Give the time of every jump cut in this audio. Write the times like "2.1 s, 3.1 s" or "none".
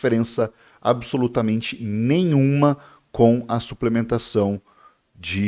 none